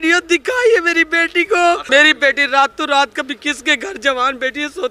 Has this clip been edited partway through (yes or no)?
yes